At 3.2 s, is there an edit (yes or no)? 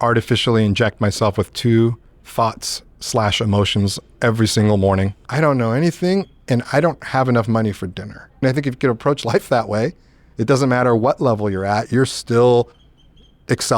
no